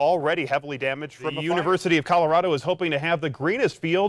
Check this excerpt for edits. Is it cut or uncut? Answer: cut